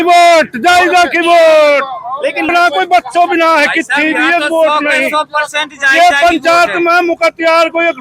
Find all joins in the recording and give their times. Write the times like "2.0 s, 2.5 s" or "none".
2.5 s